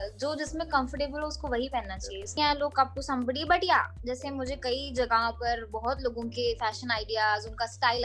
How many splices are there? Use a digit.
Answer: 1